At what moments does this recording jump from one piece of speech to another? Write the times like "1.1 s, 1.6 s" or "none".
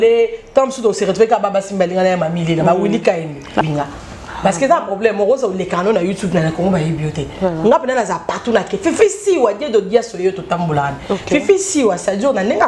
3.6 s